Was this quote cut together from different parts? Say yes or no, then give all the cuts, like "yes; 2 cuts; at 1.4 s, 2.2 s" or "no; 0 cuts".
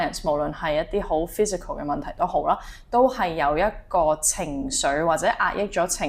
no; 0 cuts